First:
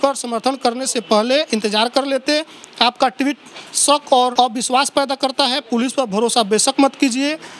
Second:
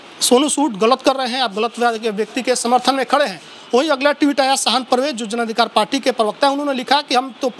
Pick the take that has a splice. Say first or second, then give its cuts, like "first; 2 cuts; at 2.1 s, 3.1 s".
first; 1 cut; at 4.3 s